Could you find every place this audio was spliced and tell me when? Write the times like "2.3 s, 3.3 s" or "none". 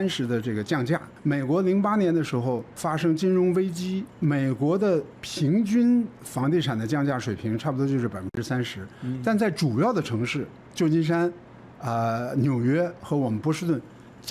1.1 s, 2.7 s, 4.1 s, 10.6 s